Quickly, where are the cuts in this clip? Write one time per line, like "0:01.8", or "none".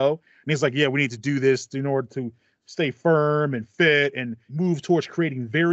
0:04.5